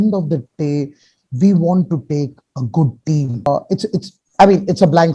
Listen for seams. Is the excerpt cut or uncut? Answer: cut